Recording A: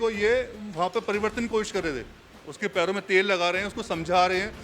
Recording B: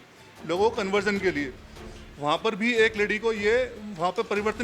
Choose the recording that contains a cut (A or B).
B